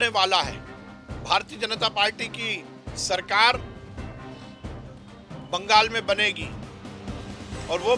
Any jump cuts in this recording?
no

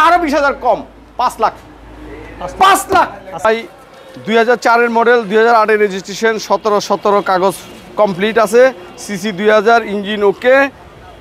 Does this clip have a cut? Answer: yes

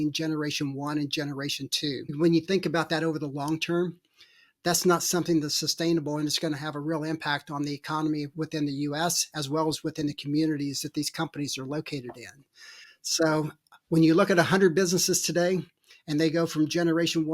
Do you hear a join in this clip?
yes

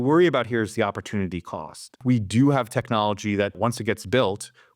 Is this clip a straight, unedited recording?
no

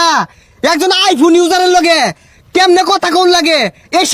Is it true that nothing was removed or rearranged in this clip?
yes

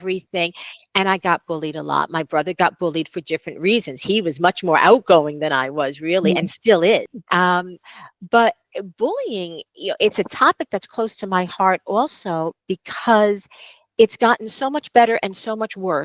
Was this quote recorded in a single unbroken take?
no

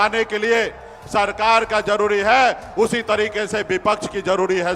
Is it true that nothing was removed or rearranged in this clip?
yes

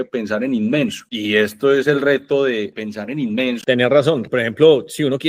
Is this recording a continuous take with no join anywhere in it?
no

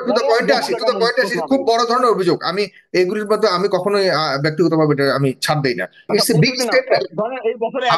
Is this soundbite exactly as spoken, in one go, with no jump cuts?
no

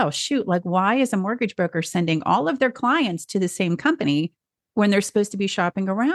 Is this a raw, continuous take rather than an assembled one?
yes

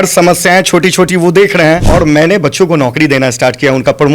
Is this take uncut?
no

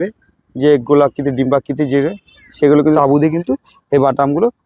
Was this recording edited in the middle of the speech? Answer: yes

